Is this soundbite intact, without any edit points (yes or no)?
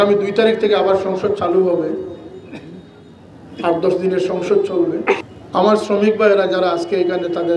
no